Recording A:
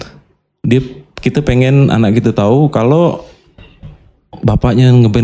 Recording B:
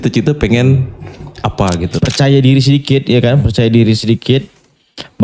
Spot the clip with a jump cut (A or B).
B